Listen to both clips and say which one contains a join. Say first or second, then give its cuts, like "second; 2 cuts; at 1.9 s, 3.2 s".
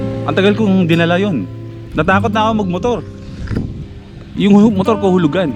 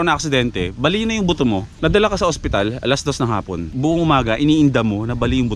second; 2 cuts; at 1.7 s, 3.7 s